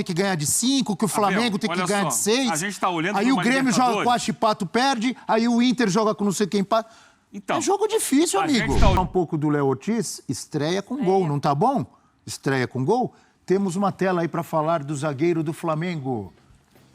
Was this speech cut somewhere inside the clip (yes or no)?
yes